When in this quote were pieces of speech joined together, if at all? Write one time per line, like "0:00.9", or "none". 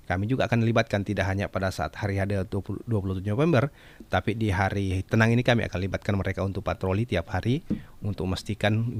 none